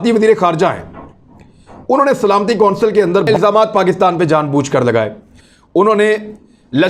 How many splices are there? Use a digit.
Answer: 2